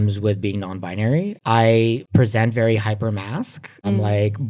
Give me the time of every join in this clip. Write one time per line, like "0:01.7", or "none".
none